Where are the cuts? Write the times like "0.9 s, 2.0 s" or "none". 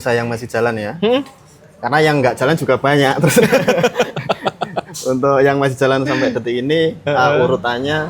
none

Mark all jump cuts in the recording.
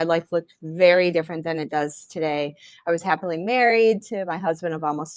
none

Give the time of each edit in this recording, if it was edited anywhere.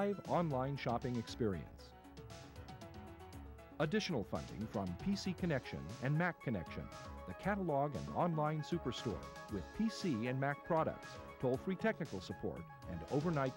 2.0 s, 3.7 s

